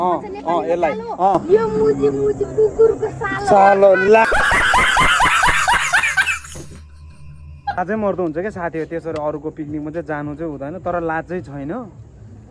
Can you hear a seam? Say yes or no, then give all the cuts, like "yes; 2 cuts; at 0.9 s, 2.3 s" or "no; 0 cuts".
yes; 2 cuts; at 1.4 s, 7.7 s